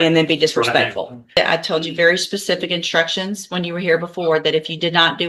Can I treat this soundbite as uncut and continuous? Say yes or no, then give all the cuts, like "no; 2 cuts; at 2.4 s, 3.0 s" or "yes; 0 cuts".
no; 1 cut; at 1.4 s